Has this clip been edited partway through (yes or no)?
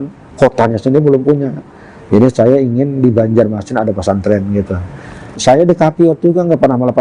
yes